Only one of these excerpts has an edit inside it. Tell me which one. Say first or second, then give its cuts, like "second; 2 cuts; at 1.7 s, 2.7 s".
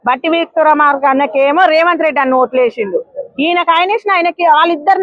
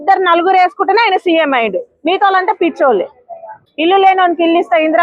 second; 1 cut; at 3.7 s